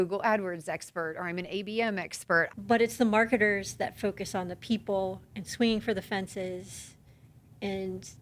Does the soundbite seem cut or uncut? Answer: cut